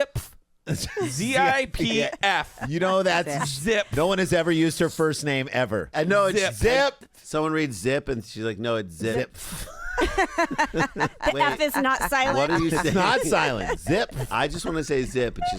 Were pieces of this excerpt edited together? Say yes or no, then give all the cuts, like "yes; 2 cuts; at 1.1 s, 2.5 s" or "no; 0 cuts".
no; 0 cuts